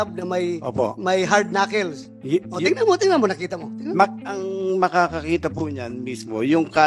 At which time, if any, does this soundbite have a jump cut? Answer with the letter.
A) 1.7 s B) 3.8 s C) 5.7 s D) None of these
D